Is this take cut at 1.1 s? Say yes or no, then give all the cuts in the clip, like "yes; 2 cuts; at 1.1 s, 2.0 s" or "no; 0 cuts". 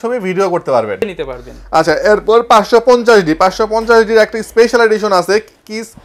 yes; 1 cut; at 1.1 s